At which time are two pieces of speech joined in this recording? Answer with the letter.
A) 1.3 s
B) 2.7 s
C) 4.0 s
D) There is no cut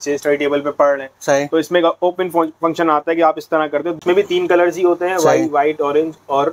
C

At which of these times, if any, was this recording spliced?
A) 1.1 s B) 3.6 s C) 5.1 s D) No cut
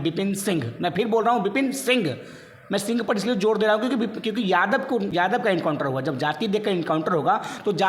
C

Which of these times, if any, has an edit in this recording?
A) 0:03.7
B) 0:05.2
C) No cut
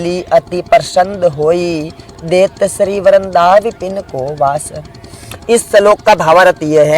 C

